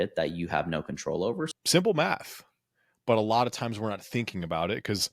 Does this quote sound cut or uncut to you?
cut